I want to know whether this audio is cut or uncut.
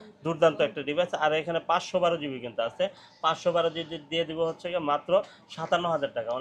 uncut